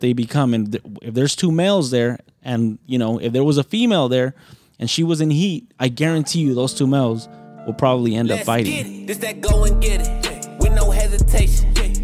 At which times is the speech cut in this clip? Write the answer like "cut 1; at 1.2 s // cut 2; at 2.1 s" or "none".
cut 1; at 8.9 s